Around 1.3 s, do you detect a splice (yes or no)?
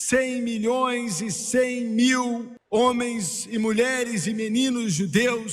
no